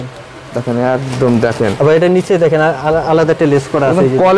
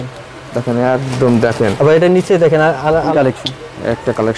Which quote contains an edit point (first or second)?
second